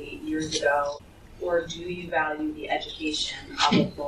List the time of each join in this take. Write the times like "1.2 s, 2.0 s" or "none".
1.0 s